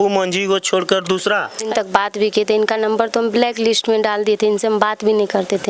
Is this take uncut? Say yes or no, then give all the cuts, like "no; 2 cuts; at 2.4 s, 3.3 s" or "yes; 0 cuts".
no; 1 cut; at 1.6 s